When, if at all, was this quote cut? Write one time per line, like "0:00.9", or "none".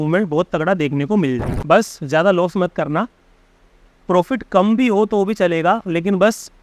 0:01.5